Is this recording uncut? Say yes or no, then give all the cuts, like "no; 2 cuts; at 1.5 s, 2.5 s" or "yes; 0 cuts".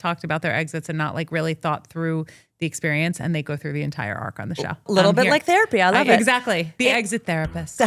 no; 2 cuts; at 4.9 s, 6.8 s